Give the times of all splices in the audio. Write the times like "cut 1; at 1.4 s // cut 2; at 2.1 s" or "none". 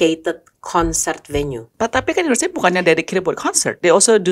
cut 1; at 1.7 s